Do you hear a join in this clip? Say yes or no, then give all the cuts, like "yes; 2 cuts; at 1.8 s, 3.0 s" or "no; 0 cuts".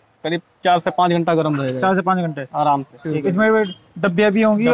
yes; 1 cut; at 3.0 s